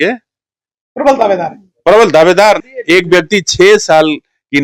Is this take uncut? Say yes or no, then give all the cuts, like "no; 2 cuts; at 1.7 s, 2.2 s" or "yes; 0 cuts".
no; 1 cut; at 2.7 s